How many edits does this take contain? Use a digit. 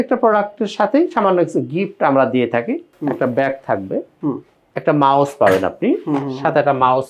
1